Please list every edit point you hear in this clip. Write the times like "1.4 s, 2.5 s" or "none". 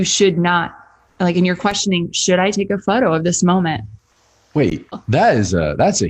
4.9 s